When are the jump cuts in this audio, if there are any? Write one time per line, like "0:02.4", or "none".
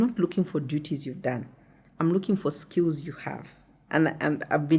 none